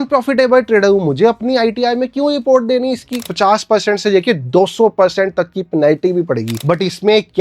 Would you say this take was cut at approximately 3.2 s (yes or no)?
yes